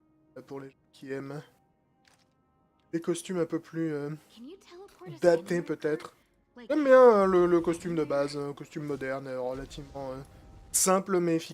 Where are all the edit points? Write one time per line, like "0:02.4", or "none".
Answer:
0:05.8